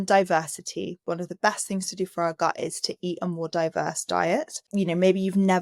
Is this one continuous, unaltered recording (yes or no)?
no